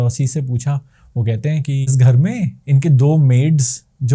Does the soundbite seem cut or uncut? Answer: cut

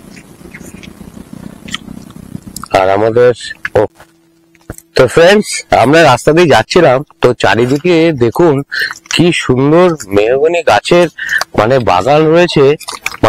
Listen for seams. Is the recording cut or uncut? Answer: cut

